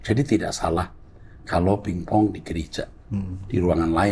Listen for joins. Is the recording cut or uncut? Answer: uncut